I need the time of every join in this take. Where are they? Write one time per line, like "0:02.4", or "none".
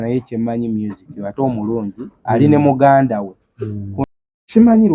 0:04.0